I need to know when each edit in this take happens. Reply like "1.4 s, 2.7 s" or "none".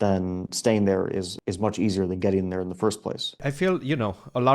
1.3 s, 3.4 s